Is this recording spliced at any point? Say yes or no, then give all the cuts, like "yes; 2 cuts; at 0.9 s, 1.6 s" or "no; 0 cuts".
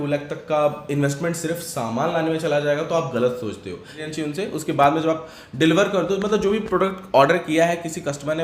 yes; 1 cut; at 4.1 s